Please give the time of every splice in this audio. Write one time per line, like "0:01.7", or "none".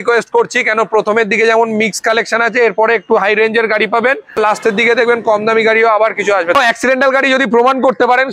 0:04.6
0:06.6